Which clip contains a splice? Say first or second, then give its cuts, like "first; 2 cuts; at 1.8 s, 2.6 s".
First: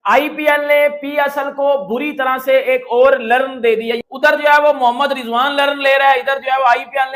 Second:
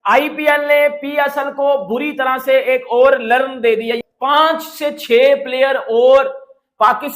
second; 1 cut; at 4.0 s